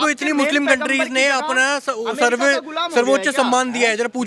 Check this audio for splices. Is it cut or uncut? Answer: uncut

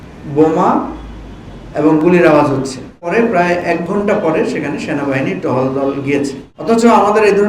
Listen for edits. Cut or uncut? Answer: cut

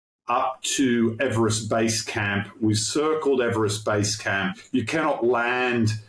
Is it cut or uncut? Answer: cut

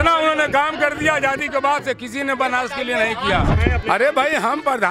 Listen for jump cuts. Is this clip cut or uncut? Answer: cut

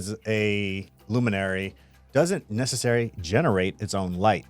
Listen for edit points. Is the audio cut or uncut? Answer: cut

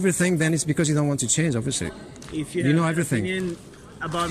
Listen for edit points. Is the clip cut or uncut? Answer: uncut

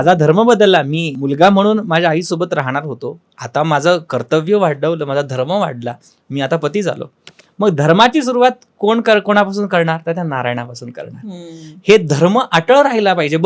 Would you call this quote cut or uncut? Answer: cut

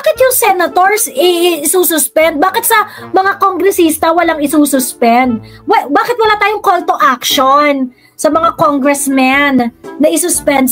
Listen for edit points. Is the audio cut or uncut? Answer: uncut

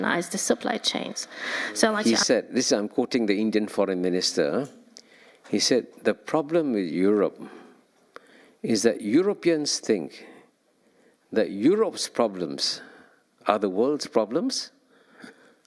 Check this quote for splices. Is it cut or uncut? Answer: cut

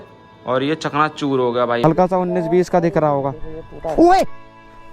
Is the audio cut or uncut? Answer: cut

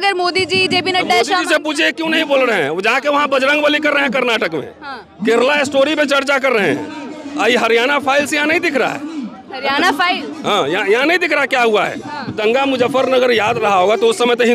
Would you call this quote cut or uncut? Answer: cut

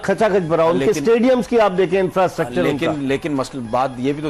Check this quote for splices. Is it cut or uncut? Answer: uncut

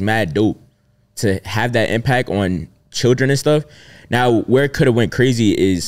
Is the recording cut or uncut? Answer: uncut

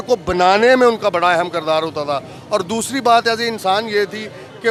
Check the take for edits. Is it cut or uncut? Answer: uncut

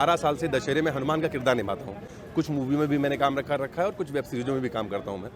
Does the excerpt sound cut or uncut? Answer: uncut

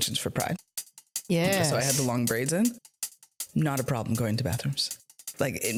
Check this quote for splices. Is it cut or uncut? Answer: uncut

